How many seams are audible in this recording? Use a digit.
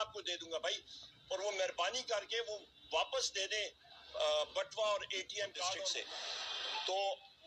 1